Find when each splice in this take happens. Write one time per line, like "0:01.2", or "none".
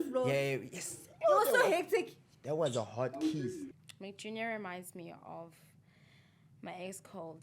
0:03.6